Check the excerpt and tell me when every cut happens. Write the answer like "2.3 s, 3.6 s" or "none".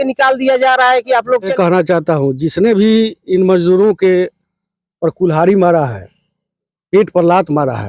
1.5 s